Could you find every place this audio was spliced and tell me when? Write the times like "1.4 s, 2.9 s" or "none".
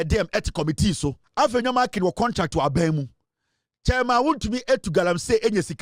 1.2 s